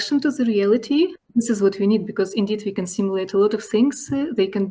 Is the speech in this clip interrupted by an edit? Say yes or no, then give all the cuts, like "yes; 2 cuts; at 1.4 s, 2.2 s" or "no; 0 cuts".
yes; 1 cut; at 1.2 s